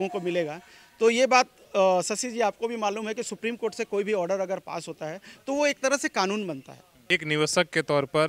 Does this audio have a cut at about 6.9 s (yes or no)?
yes